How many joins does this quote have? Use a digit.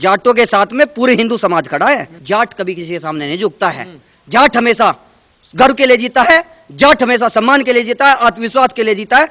1